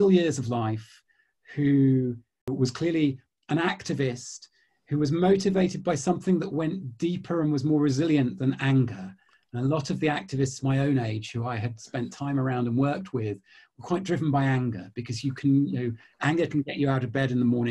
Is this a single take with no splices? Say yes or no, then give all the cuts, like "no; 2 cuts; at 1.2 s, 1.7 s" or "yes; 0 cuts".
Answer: no; 1 cut; at 2.4 s